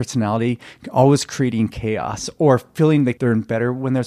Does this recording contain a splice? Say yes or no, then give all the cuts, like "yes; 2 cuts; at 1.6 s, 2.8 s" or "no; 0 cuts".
yes; 1 cut; at 3.2 s